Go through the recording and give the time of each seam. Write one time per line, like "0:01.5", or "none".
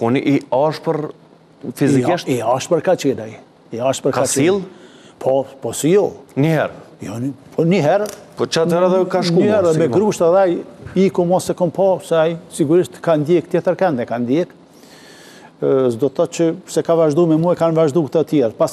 none